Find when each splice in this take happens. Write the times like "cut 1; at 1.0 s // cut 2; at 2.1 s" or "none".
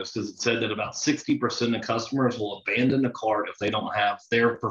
none